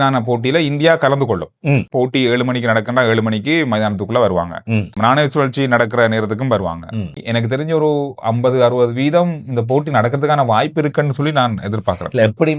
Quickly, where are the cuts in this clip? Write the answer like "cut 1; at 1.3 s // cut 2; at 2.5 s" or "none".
cut 1; at 1.9 s // cut 2; at 4.9 s // cut 3; at 7.2 s